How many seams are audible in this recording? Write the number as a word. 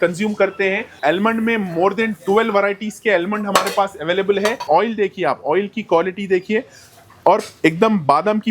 two